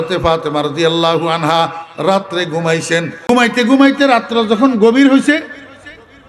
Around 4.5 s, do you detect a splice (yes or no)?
no